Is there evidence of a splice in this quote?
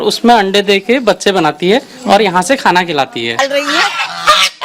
yes; 1 cut; at 3.4 s

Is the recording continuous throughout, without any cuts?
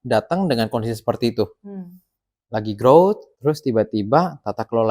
no; 1 cut; at 3.3 s

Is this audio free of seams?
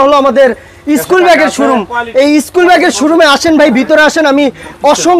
yes; 0 cuts

